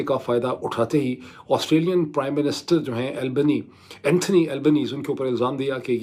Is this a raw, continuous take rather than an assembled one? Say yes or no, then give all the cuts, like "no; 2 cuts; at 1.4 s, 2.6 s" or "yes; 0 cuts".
yes; 0 cuts